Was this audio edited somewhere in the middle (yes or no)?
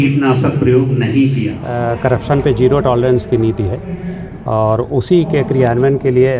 yes